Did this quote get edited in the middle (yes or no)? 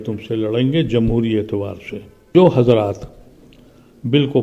yes